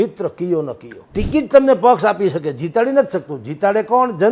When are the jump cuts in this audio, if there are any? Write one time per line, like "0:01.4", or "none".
0:01.1